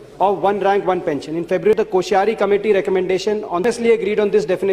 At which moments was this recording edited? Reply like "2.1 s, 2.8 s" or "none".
1.8 s, 3.6 s

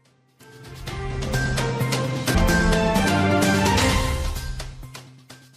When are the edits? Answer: 2.3 s

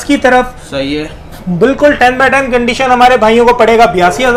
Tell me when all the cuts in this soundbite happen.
none

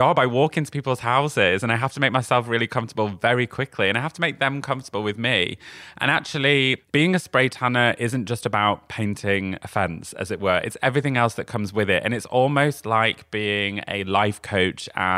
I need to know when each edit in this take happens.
6.8 s

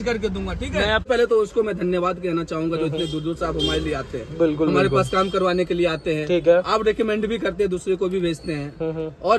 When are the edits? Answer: 1.1 s

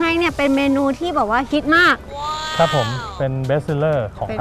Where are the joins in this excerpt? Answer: none

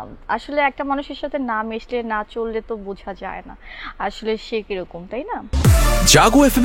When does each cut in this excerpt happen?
5.5 s

